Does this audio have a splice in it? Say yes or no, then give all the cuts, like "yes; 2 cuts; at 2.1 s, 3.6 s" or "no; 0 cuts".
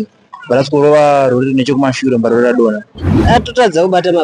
yes; 1 cut; at 3.2 s